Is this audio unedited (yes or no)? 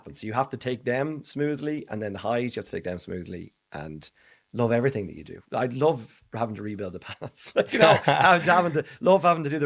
yes